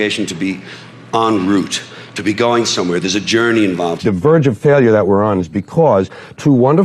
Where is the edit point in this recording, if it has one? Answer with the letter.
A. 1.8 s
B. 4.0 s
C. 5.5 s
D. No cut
B